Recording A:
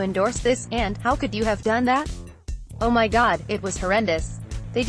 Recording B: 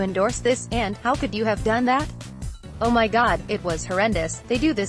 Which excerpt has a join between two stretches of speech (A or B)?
B